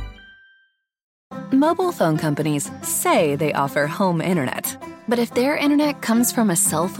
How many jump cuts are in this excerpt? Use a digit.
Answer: 1